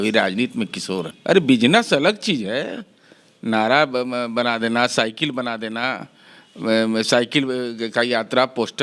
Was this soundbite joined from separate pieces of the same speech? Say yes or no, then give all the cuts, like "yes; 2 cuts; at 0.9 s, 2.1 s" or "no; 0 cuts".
yes; 1 cut; at 1.1 s